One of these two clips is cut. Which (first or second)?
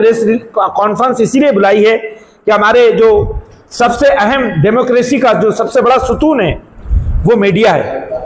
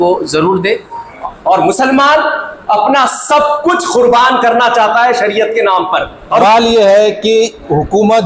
second